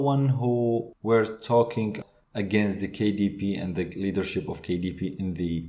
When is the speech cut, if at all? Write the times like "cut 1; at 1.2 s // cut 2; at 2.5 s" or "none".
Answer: cut 1; at 0.9 s // cut 2; at 1.9 s